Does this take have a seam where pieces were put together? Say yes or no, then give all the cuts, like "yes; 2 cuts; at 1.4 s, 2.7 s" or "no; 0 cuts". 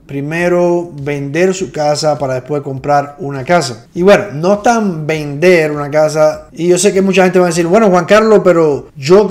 no; 0 cuts